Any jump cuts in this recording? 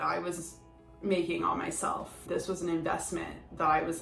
yes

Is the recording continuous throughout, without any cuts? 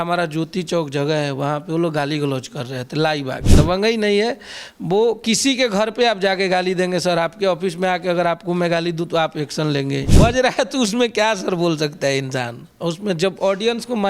no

